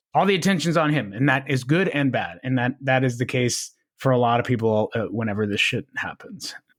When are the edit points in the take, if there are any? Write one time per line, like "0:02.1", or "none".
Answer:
none